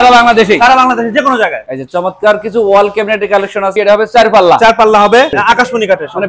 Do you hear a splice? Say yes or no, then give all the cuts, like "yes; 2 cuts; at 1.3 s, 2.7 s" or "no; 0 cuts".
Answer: yes; 3 cuts; at 1.7 s, 3.7 s, 5.3 s